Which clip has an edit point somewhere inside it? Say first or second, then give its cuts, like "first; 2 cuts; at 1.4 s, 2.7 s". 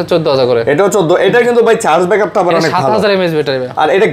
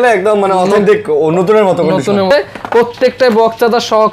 second; 1 cut; at 2.3 s